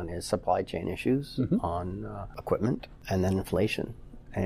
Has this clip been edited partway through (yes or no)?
yes